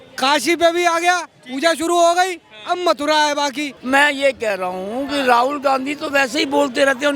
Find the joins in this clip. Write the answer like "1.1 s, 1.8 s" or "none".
3.7 s